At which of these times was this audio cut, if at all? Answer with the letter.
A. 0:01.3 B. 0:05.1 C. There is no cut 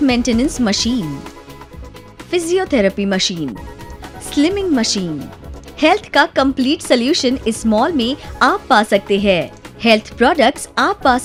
C